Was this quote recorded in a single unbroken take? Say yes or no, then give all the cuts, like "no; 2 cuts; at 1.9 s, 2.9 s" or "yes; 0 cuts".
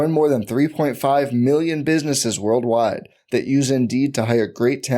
yes; 0 cuts